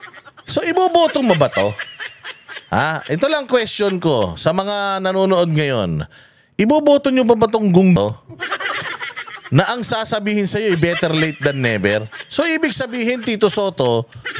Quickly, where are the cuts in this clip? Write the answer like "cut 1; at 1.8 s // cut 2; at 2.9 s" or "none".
cut 1; at 8.0 s